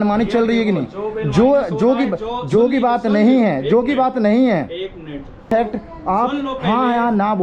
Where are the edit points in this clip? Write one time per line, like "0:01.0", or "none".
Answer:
0:05.5